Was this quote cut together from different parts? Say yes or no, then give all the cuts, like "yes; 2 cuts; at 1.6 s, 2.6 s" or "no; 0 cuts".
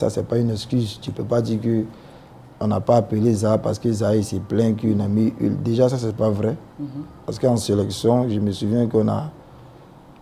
no; 0 cuts